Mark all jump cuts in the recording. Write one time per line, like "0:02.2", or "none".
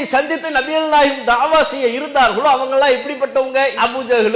none